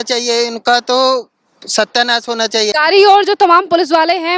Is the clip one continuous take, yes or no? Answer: no